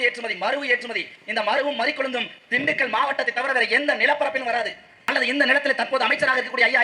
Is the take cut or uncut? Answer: cut